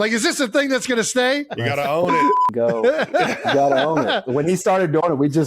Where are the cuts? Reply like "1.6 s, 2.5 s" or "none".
1.5 s, 4.2 s

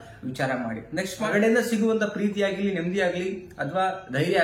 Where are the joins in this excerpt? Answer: 1.3 s

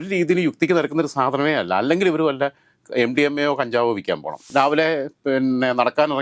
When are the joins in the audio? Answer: 4.4 s

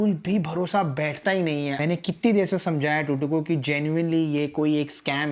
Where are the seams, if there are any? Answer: 1.8 s

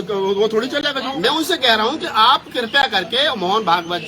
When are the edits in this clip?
1.0 s

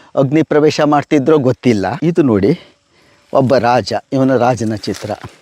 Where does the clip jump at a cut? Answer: 2.0 s

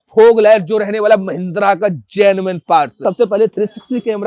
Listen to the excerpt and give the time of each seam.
3.1 s

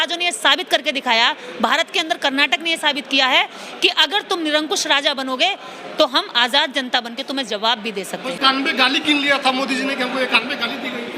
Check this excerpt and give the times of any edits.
8.4 s

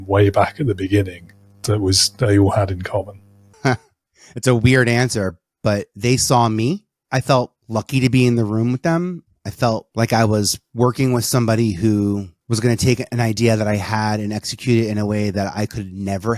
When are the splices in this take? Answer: 6.9 s, 7.6 s, 9.9 s, 10.6 s, 12.3 s

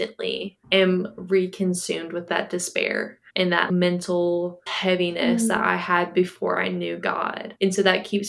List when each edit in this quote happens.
2.2 s, 3.7 s, 4.7 s

